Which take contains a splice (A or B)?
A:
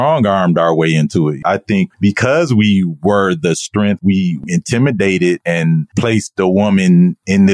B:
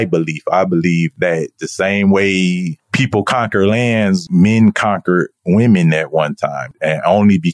A